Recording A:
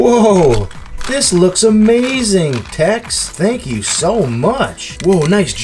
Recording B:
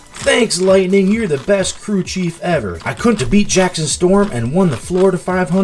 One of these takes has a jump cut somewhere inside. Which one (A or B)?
A